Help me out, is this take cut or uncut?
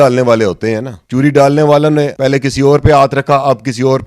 cut